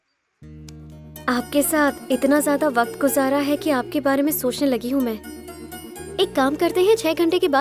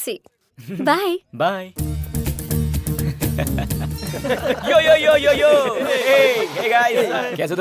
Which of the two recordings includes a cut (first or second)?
second